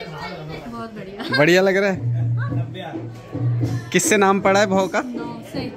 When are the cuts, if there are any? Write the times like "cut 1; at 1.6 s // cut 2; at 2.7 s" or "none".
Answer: none